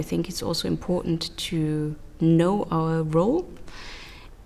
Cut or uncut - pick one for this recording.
uncut